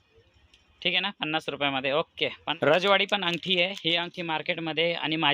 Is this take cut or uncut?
cut